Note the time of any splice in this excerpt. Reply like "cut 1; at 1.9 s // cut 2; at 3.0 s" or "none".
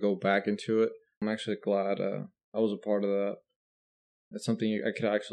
cut 1; at 1.2 s